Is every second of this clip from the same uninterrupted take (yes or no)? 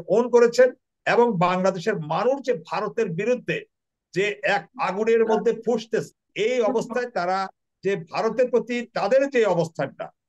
no